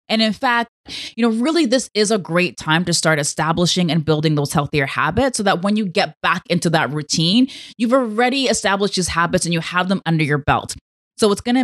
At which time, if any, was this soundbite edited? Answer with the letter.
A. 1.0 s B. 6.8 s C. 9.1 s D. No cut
A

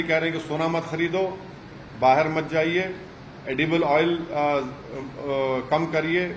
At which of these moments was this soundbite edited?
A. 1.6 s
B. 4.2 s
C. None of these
C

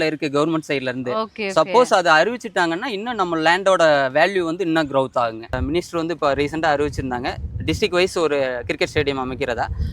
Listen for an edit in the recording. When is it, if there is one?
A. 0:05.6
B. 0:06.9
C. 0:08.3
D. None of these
A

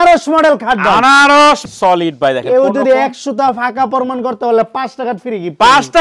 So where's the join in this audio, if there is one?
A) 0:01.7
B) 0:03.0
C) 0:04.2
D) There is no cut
A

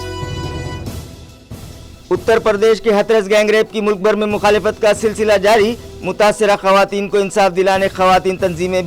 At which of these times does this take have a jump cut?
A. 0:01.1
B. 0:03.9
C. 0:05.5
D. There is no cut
A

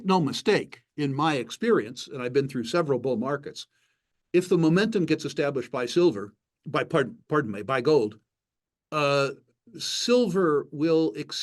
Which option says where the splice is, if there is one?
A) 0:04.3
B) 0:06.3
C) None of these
C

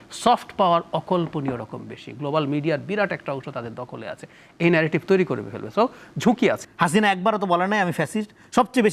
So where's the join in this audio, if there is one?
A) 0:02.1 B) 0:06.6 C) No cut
B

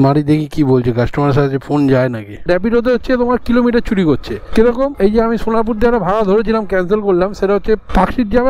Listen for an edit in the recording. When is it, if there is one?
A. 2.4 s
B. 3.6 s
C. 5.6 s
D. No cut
A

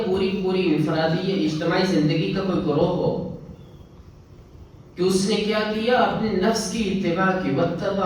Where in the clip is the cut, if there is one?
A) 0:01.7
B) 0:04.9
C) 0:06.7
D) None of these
D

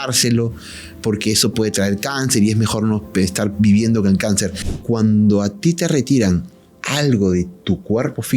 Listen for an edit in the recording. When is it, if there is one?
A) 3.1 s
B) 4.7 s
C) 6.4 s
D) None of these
B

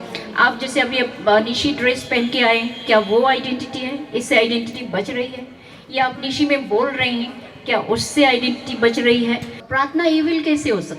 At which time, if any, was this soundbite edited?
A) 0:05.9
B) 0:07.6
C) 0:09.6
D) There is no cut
C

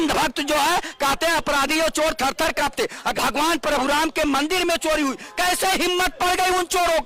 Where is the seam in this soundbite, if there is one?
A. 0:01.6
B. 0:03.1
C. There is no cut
B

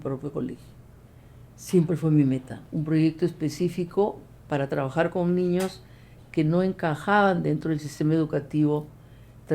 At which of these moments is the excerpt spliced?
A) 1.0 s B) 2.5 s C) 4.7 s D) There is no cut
B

